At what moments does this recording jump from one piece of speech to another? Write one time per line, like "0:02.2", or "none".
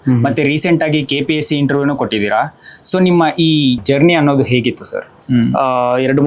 0:03.8
0:05.1